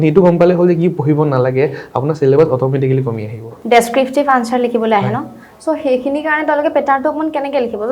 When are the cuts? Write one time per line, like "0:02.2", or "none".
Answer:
0:03.5